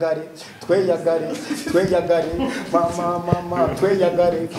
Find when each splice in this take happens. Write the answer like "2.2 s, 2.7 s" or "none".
none